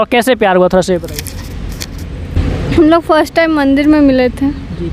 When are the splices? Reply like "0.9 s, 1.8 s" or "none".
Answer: none